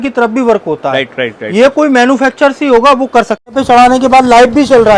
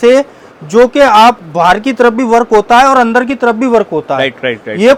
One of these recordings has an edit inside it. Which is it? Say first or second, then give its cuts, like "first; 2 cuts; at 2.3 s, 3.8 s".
first; 1 cut; at 3.5 s